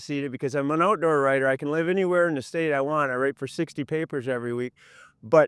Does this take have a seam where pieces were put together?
no; 0 cuts

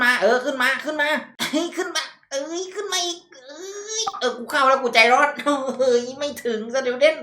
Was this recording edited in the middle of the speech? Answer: yes; 1 cut; at 1.3 s

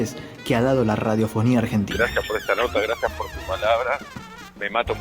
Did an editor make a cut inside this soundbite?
yes; 1 cut; at 1.9 s

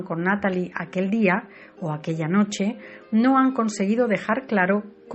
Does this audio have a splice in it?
yes; 1 cut; at 3.7 s

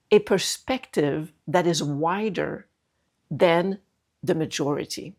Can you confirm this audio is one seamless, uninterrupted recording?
yes; 0 cuts

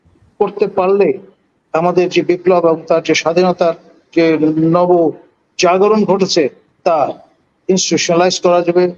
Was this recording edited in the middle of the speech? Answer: no; 0 cuts

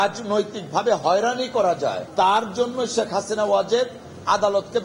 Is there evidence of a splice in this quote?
yes; 1 cut; at 2.0 s

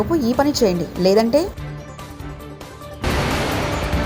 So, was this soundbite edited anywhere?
no; 0 cuts

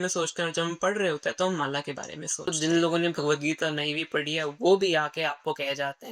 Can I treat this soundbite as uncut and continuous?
no; 1 cut; at 2.5 s

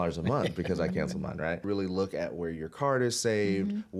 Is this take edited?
yes; 1 cut; at 1.6 s

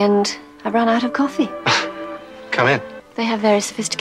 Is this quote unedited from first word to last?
no; 1 cut; at 3.0 s

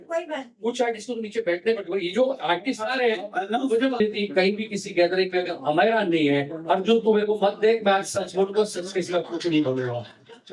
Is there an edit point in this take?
yes; 1 cut; at 4.0 s

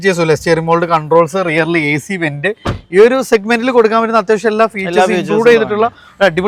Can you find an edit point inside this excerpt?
no; 0 cuts

